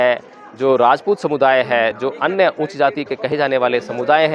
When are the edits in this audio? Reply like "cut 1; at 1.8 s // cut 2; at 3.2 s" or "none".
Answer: none